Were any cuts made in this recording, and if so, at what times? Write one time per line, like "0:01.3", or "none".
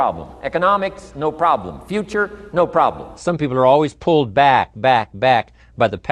0:03.2